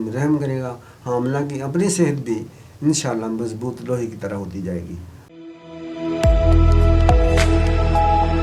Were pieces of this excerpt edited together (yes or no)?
yes